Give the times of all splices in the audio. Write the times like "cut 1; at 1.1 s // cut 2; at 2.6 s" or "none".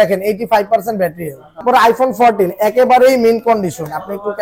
cut 1; at 1.6 s